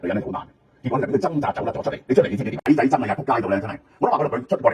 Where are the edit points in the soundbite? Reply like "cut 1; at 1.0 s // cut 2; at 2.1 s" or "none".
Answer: cut 1; at 2.6 s